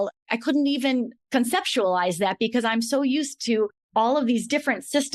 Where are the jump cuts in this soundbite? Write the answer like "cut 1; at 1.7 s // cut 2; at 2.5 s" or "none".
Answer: none